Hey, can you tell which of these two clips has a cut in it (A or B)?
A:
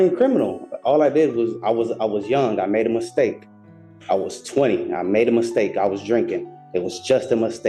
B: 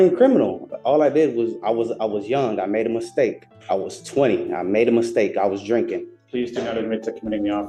B